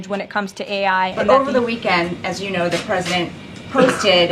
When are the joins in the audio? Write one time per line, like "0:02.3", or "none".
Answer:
0:01.2